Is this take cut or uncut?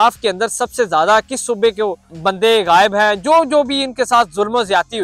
cut